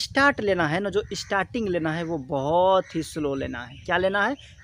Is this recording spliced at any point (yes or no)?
no